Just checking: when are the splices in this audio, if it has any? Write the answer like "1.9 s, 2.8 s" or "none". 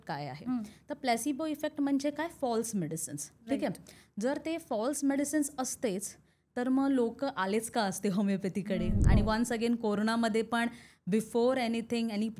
9.0 s